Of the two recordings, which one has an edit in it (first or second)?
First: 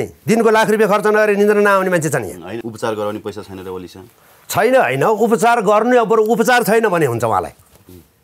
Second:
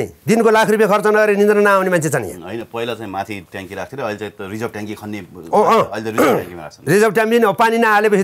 first